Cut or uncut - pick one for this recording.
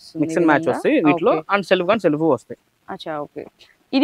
uncut